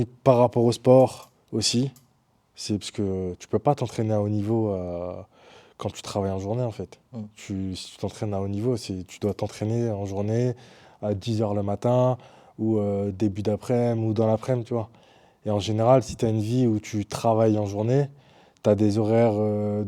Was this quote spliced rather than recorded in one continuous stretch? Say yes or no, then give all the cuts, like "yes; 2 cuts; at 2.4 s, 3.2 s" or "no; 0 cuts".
no; 0 cuts